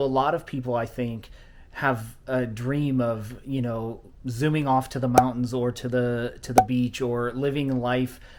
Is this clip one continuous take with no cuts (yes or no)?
yes